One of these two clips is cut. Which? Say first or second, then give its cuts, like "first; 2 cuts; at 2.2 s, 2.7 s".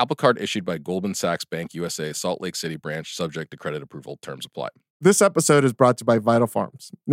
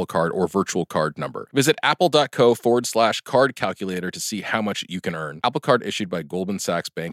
first; 1 cut; at 4.9 s